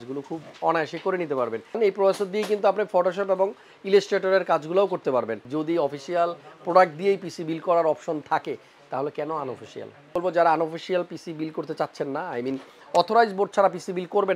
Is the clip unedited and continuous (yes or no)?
no